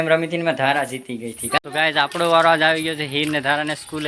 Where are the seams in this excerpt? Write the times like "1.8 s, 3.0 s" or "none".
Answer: 1.6 s